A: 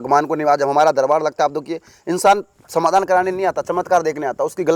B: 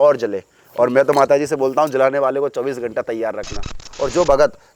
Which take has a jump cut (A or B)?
B